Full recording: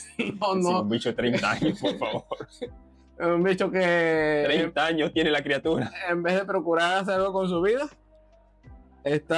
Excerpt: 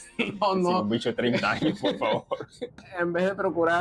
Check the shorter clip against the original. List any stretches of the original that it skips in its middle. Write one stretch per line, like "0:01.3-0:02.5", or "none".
0:02.9-0:06.0